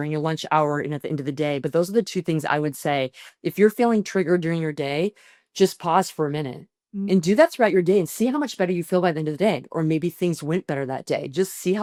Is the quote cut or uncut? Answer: uncut